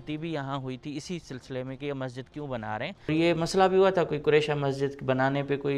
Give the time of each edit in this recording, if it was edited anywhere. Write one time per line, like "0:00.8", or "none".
0:03.1